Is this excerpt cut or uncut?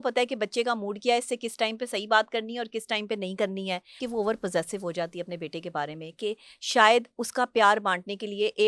cut